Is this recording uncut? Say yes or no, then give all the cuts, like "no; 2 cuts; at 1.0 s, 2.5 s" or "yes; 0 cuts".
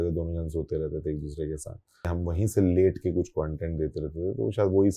no; 1 cut; at 2.1 s